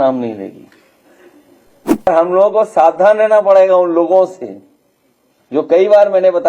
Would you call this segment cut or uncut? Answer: cut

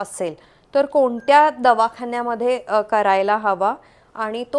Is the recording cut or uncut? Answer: uncut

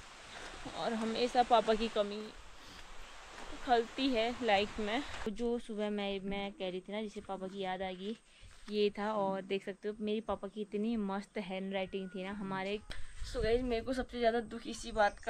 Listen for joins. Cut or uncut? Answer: cut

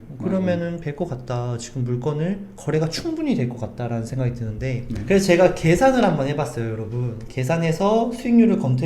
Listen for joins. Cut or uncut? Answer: cut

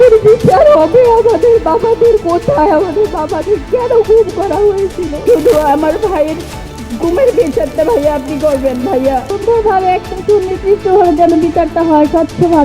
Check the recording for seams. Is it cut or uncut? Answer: cut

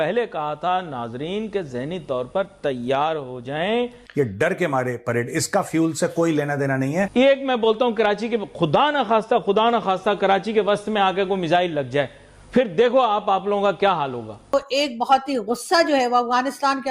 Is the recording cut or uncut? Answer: uncut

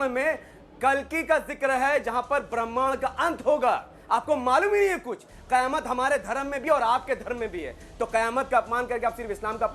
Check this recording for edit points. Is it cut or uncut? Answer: uncut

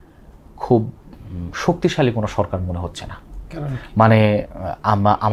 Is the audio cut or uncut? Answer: uncut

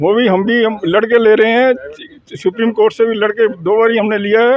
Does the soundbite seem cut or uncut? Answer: uncut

